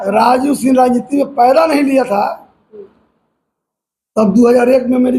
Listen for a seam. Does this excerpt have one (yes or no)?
no